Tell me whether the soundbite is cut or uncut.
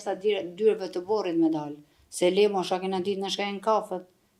uncut